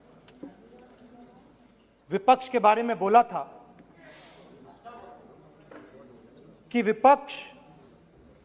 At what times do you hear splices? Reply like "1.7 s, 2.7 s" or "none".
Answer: none